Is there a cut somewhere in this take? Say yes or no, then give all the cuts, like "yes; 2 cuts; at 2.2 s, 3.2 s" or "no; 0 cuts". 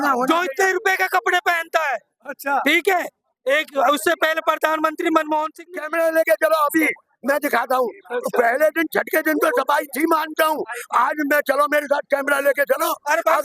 yes; 1 cut; at 5.8 s